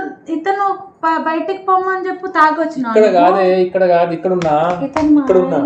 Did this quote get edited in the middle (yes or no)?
no